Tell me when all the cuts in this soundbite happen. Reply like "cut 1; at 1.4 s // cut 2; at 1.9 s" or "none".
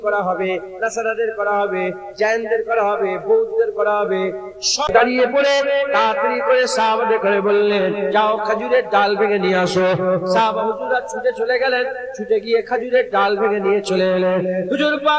cut 1; at 4.7 s